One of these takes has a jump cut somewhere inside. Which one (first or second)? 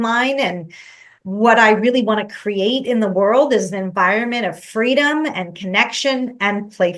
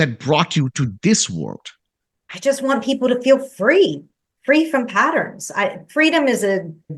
second